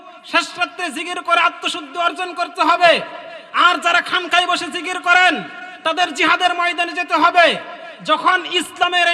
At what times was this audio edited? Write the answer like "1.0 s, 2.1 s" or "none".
none